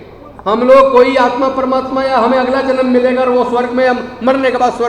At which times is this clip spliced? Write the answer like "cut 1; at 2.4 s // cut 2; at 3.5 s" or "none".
none

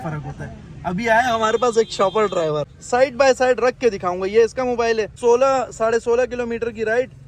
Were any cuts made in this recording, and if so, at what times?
cut 1; at 2.8 s // cut 2; at 5.2 s

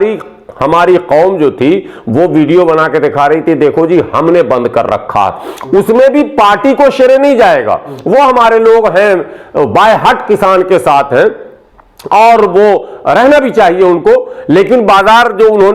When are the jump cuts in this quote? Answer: none

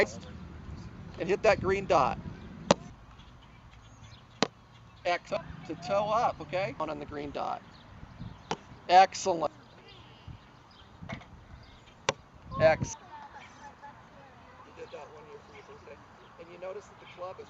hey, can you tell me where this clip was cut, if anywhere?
cut 1; at 2.9 s

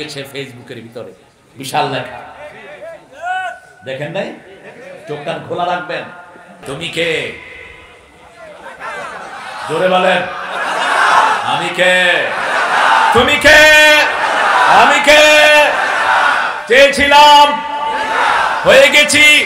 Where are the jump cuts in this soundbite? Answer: cut 1; at 6.6 s

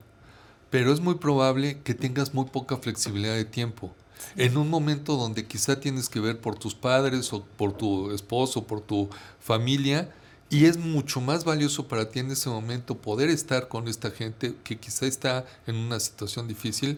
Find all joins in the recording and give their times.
none

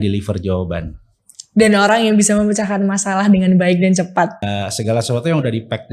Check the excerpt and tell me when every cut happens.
cut 1; at 4.4 s

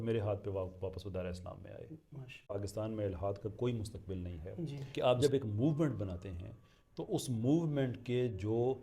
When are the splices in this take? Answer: cut 1; at 2.5 s // cut 2; at 4.8 s

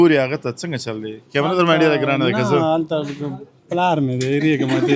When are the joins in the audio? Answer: none

